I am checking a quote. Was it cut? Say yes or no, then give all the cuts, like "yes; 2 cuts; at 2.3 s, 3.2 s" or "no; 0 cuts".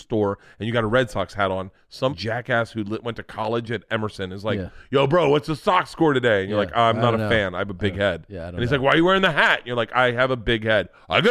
yes; 1 cut; at 2.2 s